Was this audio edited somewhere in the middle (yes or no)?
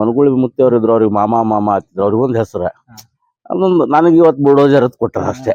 no